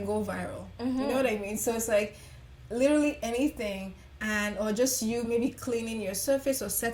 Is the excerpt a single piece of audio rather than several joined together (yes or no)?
yes